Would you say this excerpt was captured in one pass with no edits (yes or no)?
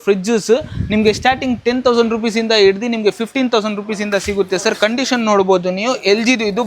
yes